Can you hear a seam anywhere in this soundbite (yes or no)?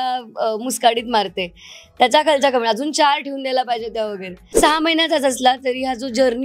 yes